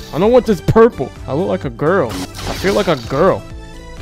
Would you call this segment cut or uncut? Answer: uncut